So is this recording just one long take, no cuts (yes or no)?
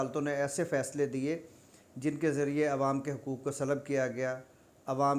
yes